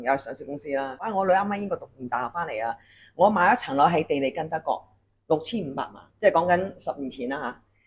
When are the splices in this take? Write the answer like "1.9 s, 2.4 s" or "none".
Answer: 1.0 s